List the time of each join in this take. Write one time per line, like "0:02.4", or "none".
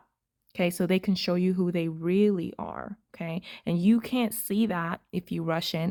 none